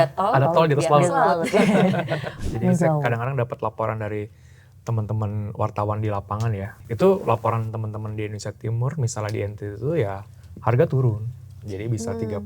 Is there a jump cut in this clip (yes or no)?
yes